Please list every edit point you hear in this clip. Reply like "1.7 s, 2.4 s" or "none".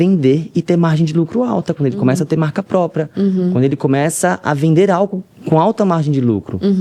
none